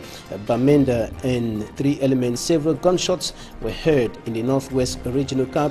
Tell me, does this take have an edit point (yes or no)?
yes